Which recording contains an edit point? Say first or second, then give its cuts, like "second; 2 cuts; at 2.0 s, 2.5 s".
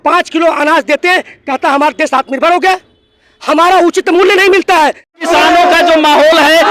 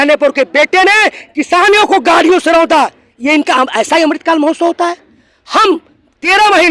first; 1 cut; at 5.2 s